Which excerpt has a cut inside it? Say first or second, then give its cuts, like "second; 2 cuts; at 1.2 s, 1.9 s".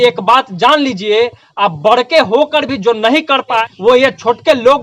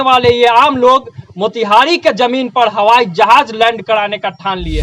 first; 1 cut; at 3.6 s